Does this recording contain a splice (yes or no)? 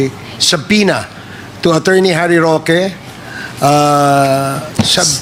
no